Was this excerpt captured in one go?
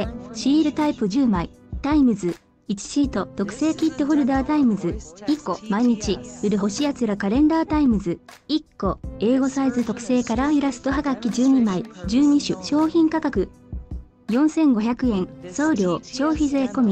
yes; 0 cuts

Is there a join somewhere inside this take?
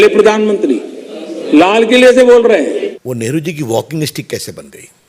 yes; 1 cut; at 2.9 s

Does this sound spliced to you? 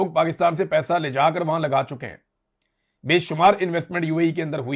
no; 0 cuts

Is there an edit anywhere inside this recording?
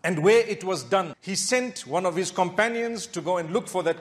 no; 0 cuts

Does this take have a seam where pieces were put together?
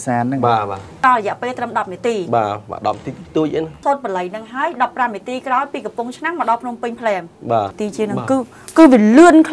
yes; 3 cuts; at 1.0 s, 3.8 s, 7.8 s

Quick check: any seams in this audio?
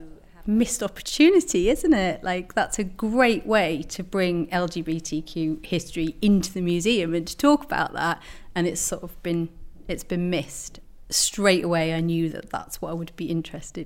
no; 0 cuts

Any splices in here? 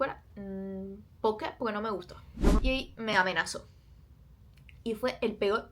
yes; 1 cut; at 2.6 s

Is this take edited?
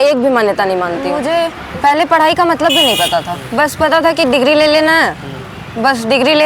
yes; 1 cut; at 1.1 s

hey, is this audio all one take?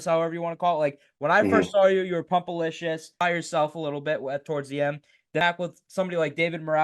no; 2 cuts; at 3.1 s, 5.4 s

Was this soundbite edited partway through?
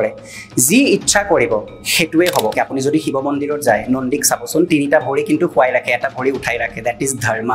yes; 1 cut; at 2.5 s

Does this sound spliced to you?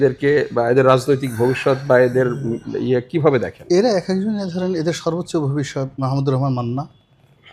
no; 0 cuts

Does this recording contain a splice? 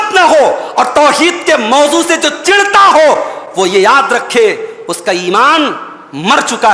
no; 0 cuts

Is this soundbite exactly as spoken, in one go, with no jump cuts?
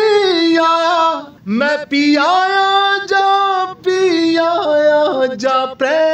no; 1 cut; at 1.3 s

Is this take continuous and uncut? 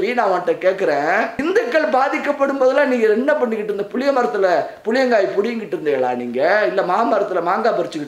no; 1 cut; at 1.3 s

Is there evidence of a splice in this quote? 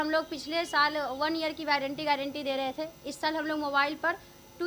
no; 0 cuts

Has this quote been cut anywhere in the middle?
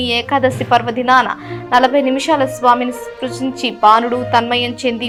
no; 0 cuts

